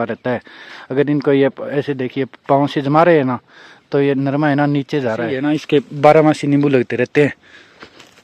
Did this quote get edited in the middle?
yes; 1 cut; at 5.4 s

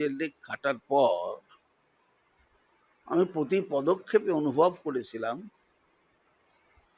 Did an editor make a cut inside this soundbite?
no; 0 cuts

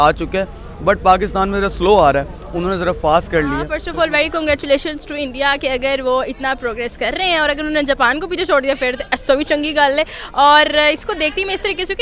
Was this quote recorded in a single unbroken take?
no; 1 cut; at 3.6 s

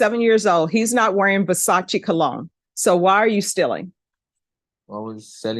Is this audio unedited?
yes; 0 cuts

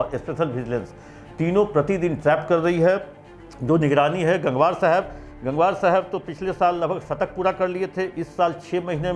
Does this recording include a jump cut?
no; 0 cuts

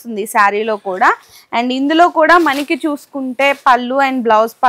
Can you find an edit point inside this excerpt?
no; 0 cuts

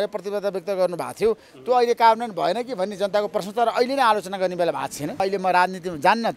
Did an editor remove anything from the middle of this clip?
yes; 1 cut; at 5.2 s

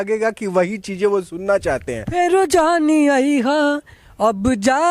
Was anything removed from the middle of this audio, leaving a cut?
yes; 1 cut; at 2.1 s

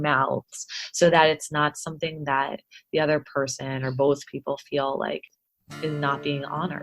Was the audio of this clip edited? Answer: yes; 1 cut; at 5.3 s

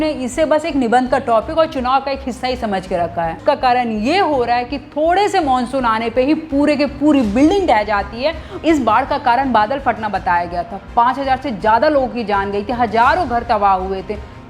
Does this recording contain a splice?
yes; 2 cuts; at 3.4 s, 8.5 s

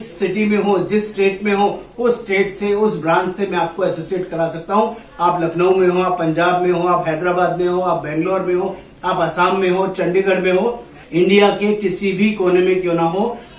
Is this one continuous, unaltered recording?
yes; 0 cuts

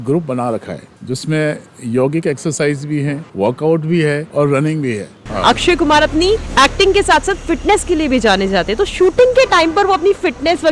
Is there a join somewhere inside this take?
yes; 5 cuts; at 0.9 s, 3.2 s, 4.3 s, 5.3 s, 6.5 s

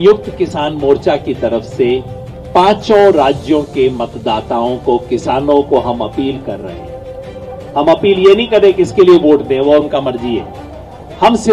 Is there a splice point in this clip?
no; 0 cuts

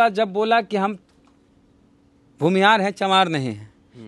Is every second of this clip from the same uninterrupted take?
yes; 0 cuts

